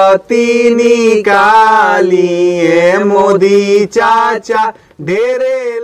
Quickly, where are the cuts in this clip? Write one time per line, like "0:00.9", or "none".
none

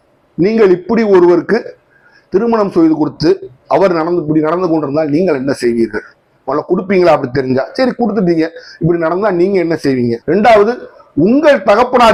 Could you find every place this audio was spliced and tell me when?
none

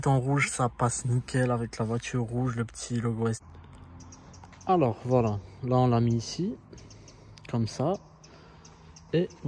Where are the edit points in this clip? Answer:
0:03.4

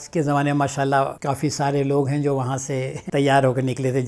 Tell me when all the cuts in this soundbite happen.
0:01.2
0:03.0

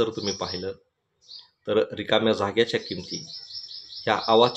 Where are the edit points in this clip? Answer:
none

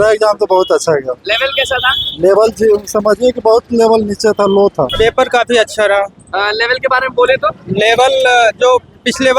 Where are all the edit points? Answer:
0:04.9

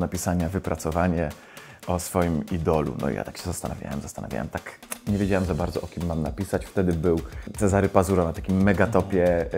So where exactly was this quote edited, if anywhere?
0:07.4

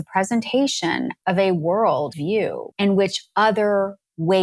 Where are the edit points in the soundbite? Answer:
0:01.1
0:02.1

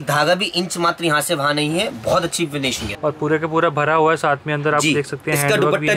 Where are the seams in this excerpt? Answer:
0:02.8

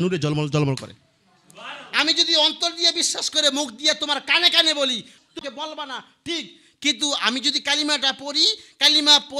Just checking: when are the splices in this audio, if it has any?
none

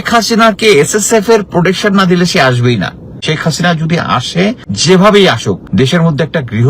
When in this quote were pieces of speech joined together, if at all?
0:03.2
0:04.7
0:05.6

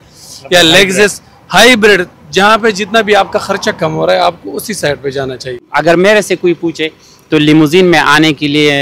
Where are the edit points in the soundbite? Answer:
0:05.6

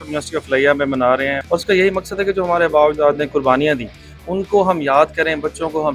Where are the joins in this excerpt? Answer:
0:01.4

